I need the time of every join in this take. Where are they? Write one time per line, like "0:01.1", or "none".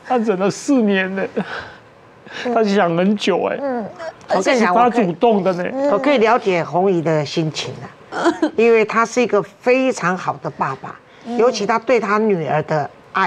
none